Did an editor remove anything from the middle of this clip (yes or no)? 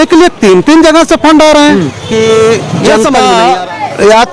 yes